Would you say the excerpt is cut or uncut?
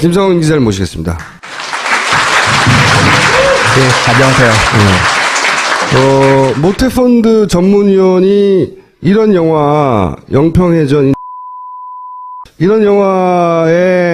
cut